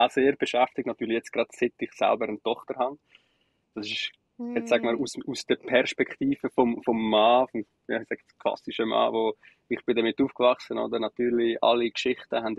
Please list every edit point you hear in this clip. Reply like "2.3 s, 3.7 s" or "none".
none